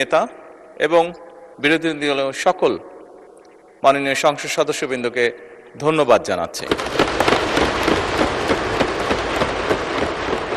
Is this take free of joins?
yes; 0 cuts

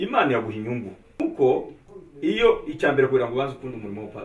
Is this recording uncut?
no; 1 cut; at 1.2 s

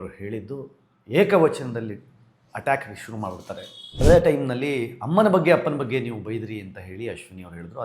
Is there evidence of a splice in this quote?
yes; 1 cut; at 4.0 s

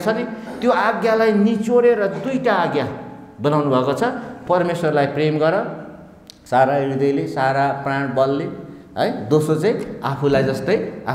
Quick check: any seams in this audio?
no; 0 cuts

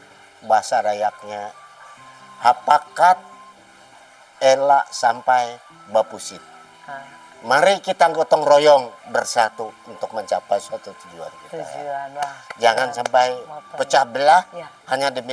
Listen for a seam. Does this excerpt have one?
no; 0 cuts

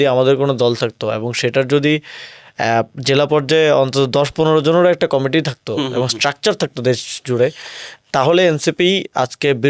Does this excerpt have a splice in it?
no; 0 cuts

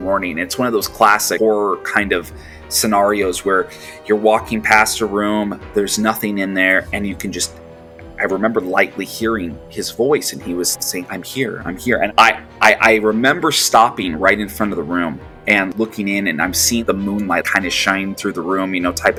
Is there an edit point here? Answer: no; 0 cuts

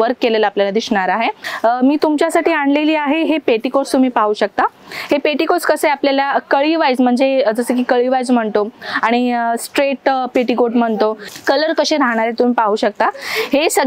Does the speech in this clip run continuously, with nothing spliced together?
no; 2 cuts; at 1.5 s, 11.3 s

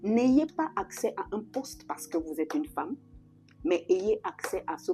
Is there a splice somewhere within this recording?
no; 0 cuts

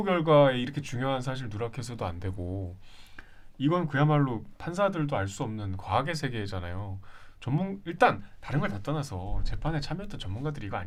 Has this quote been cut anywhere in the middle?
no; 0 cuts

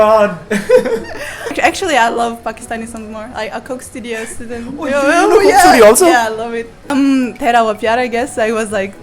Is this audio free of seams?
no; 2 cuts; at 1.5 s, 6.9 s

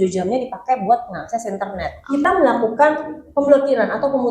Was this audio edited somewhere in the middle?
yes; 1 cut; at 2.2 s

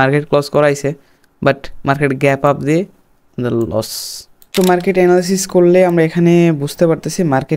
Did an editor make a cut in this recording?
yes; 1 cut; at 4.5 s

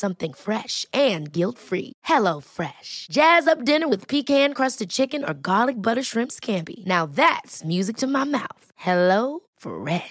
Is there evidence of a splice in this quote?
no; 0 cuts

